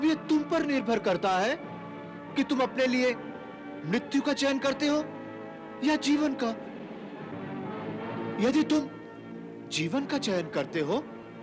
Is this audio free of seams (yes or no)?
yes